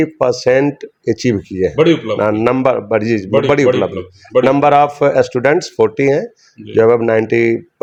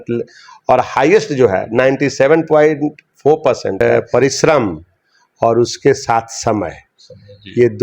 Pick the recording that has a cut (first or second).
second